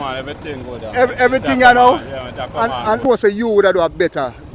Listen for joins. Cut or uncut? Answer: cut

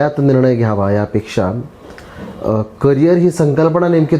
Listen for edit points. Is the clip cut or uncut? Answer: uncut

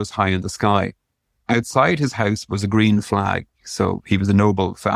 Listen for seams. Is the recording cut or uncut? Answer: uncut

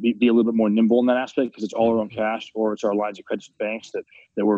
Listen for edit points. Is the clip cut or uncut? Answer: uncut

